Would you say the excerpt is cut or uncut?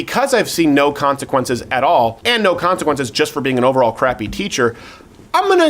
cut